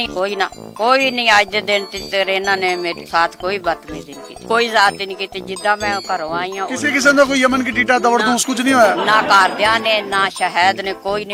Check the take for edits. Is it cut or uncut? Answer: uncut